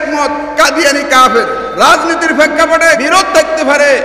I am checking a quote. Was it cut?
yes; 2 cuts; at 1.7 s, 3.0 s

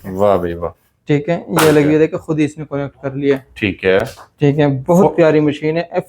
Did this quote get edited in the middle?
no; 0 cuts

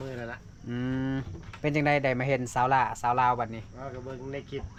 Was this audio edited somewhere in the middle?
no; 0 cuts

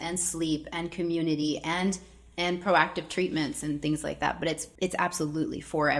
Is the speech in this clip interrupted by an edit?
yes; 1 cut; at 4.7 s

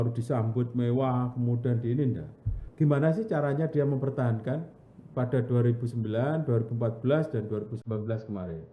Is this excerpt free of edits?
no; 1 cut; at 2.6 s

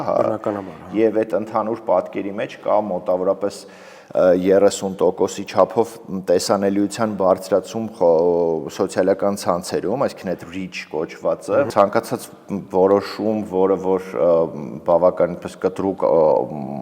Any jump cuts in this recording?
yes; 1 cut; at 11.7 s

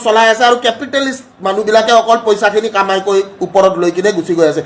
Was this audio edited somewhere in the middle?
no; 0 cuts

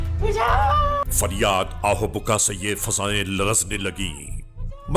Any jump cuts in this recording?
no; 0 cuts

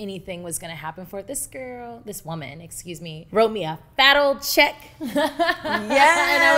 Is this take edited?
yes; 1 cut; at 3.2 s

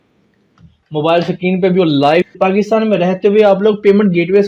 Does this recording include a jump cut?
yes; 1 cut; at 2.3 s

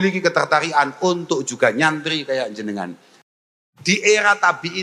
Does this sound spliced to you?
yes; 1 cut; at 3.2 s

